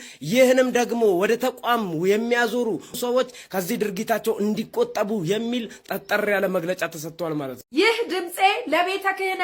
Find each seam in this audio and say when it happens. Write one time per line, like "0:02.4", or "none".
0:07.6